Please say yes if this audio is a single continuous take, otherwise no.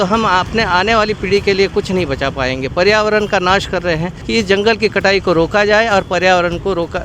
no